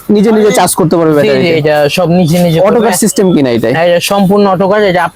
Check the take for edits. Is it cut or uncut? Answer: uncut